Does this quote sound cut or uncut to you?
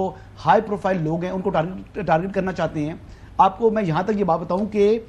uncut